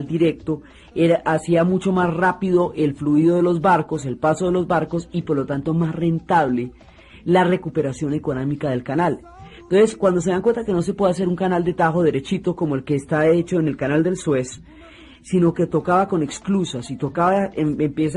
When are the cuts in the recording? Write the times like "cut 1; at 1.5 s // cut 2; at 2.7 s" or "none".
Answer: none